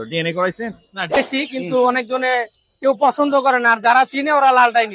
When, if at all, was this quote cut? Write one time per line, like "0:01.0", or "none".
0:01.1